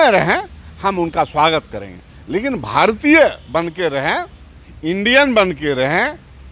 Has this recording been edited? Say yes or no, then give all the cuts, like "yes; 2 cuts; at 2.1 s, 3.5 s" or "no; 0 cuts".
no; 0 cuts